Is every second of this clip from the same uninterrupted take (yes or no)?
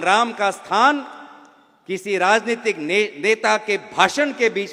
yes